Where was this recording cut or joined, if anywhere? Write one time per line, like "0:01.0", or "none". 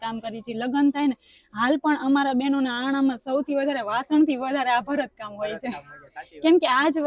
none